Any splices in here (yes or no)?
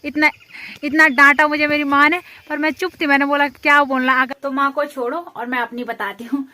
yes